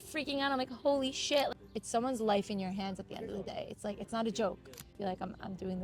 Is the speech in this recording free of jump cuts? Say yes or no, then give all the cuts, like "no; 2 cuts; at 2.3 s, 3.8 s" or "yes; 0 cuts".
no; 2 cuts; at 1.5 s, 5.0 s